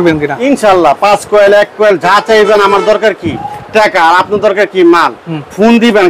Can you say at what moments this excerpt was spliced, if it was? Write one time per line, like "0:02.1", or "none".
none